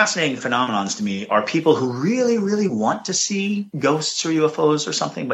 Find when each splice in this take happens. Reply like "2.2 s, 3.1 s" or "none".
3.7 s